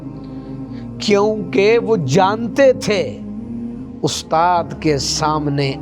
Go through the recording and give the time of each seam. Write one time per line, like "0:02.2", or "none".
0:01.1